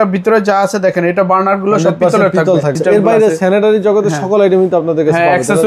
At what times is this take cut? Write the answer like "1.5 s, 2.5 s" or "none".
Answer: 2.8 s